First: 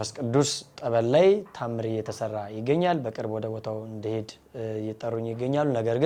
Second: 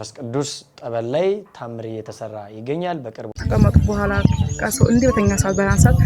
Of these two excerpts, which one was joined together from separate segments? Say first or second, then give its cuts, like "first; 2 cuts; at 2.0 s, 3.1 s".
second; 1 cut; at 3.4 s